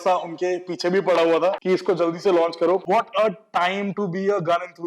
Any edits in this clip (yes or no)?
yes